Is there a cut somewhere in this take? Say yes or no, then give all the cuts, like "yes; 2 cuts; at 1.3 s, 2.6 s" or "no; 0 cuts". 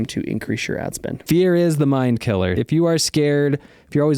yes; 2 cuts; at 1.1 s, 2.6 s